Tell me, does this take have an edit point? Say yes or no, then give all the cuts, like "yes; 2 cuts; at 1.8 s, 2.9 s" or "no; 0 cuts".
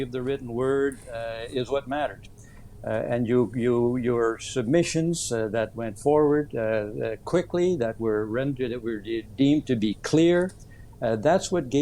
no; 0 cuts